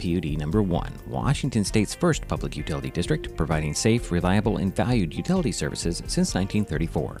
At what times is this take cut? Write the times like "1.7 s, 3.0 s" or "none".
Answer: none